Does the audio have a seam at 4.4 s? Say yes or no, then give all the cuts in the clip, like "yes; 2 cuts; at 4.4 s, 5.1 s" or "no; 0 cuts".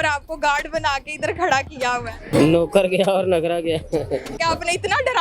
yes; 2 cuts; at 2.3 s, 4.4 s